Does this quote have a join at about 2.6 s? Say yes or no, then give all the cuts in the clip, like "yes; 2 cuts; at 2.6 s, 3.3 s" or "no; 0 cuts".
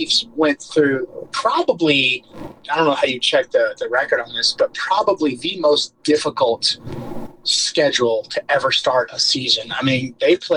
yes; 1 cut; at 2.6 s